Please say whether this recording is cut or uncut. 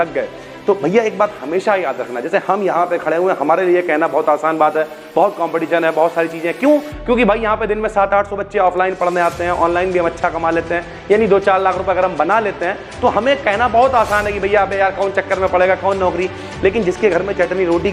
uncut